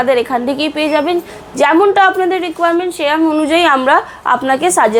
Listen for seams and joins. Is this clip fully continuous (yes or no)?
yes